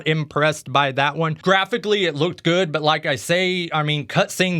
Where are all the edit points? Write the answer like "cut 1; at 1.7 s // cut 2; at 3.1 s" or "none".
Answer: cut 1; at 1.4 s